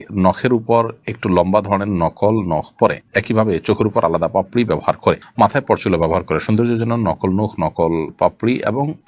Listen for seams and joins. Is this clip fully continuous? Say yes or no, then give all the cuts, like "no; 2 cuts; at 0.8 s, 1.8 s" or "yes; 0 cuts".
yes; 0 cuts